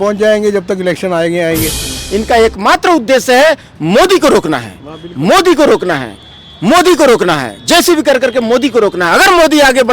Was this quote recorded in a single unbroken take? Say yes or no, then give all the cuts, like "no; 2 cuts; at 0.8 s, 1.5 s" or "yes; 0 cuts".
no; 1 cut; at 2.0 s